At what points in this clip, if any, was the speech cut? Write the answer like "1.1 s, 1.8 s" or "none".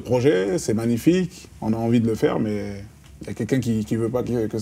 none